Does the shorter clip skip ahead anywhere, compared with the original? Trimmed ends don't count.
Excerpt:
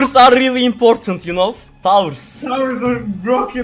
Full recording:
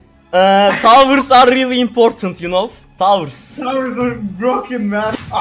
no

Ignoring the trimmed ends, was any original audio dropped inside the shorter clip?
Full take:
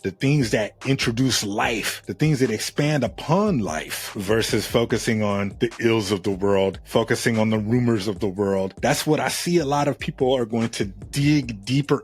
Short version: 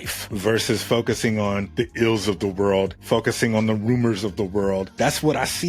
no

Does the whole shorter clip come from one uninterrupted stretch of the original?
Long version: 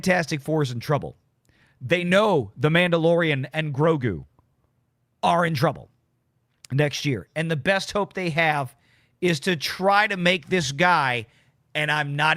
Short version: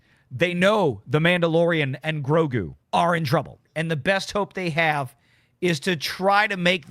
no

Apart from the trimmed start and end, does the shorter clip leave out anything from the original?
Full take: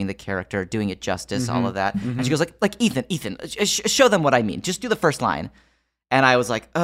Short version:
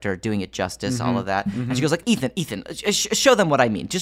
yes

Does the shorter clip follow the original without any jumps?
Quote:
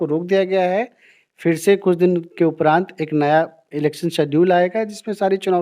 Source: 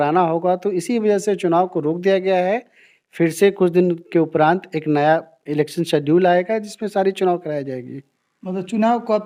yes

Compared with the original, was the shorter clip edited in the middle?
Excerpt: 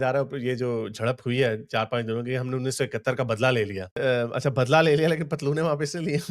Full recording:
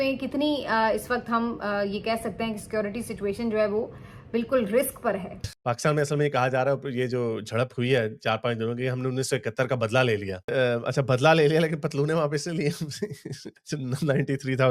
no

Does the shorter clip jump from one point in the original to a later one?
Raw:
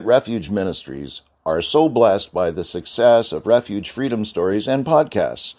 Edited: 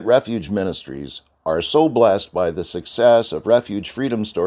no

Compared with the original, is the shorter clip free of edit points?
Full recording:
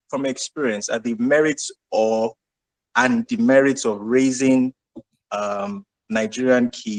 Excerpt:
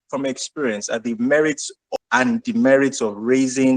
no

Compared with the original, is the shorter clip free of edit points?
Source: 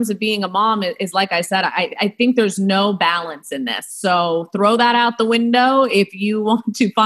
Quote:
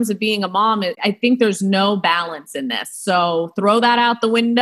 no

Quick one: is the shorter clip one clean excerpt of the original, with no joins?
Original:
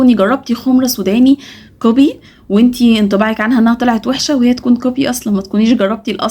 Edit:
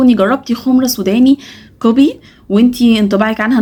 yes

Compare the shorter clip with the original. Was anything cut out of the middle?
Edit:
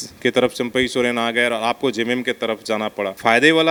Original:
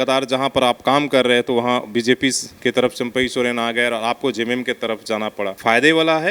no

